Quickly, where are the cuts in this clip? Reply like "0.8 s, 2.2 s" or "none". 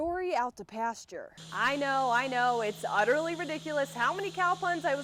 none